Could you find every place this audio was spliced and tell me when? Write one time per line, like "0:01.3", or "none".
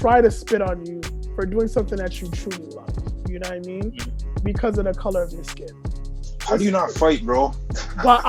none